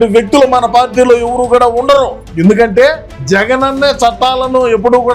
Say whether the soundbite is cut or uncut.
cut